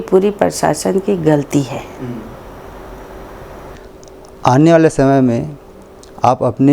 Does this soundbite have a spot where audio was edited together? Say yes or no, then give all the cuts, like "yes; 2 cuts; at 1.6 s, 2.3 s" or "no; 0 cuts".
yes; 1 cut; at 3.8 s